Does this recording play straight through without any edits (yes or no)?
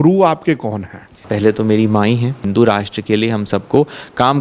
no